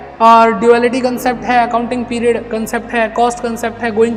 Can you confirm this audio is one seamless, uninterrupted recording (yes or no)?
yes